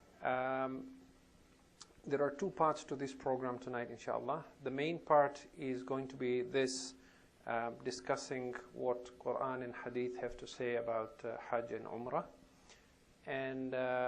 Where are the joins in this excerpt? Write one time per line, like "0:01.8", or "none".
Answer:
0:05.4